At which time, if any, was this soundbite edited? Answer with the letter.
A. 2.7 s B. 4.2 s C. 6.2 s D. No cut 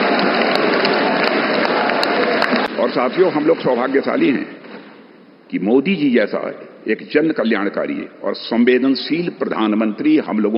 A